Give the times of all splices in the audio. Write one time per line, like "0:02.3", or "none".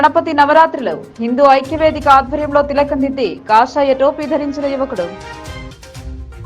none